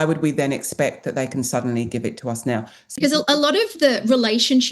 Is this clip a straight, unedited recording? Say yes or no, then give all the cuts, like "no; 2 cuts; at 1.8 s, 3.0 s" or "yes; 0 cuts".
no; 1 cut; at 3.0 s